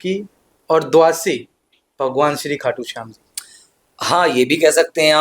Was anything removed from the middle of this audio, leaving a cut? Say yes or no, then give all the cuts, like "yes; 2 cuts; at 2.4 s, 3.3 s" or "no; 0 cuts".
no; 0 cuts